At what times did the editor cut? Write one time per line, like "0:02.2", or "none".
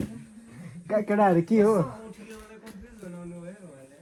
none